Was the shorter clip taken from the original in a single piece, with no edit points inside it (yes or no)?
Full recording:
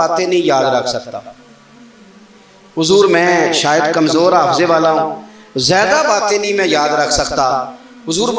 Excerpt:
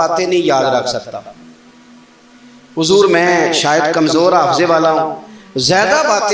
yes